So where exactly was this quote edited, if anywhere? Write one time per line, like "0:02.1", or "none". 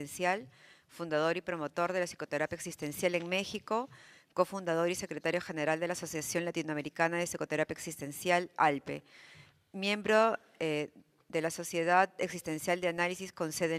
0:06.8